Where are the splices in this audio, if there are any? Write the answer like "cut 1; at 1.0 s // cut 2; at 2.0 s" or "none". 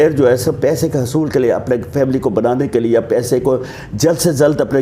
none

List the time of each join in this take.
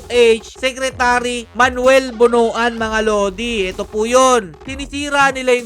cut 1; at 4.6 s

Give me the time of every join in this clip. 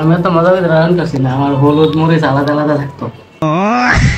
none

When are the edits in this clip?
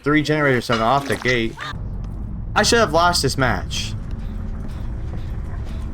cut 1; at 1.7 s

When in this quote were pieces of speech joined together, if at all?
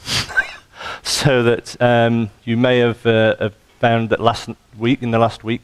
none

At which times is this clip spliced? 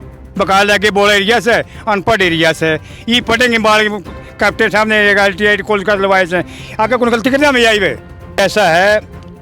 cut 1; at 8.4 s

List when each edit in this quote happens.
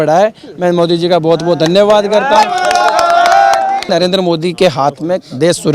cut 1; at 3.9 s

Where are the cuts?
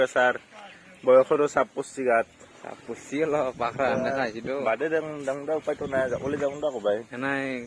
none

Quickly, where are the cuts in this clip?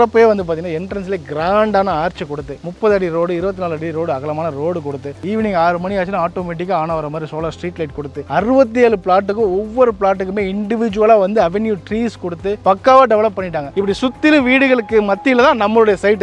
cut 1; at 2.6 s // cut 2; at 5.2 s // cut 3; at 13.6 s

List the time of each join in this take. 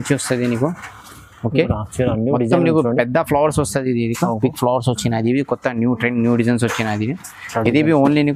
none

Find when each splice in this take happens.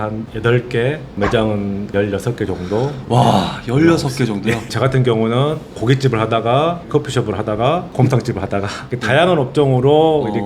cut 1; at 4.7 s

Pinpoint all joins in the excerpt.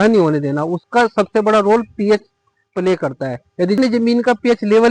cut 1; at 3.8 s

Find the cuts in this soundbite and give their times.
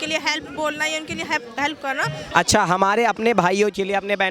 cut 1; at 2.3 s

